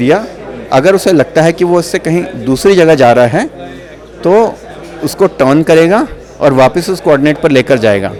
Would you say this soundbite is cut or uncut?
uncut